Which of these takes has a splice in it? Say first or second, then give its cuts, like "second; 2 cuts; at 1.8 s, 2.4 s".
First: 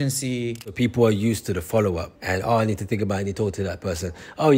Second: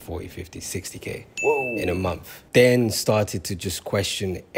first; 2 cuts; at 0.8 s, 2.1 s